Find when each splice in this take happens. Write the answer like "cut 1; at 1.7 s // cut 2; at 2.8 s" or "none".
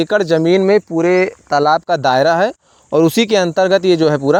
none